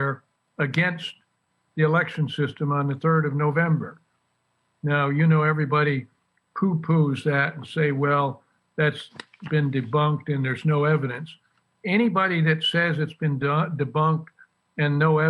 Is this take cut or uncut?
uncut